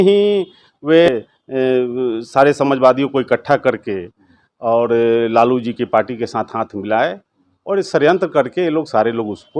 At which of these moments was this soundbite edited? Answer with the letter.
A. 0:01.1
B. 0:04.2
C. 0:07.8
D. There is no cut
A